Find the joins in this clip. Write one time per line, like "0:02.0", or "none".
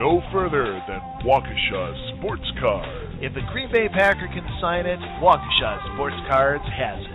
none